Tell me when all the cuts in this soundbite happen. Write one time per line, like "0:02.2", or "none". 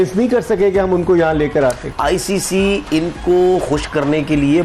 0:01.9